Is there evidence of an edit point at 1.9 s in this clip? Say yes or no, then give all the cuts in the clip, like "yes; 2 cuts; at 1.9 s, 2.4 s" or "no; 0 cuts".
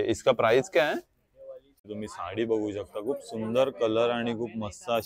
yes; 1 cut; at 1.9 s